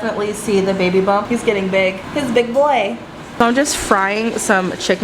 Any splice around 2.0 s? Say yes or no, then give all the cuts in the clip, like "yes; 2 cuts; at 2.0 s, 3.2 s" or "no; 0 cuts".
yes; 2 cuts; at 2.0 s, 3.2 s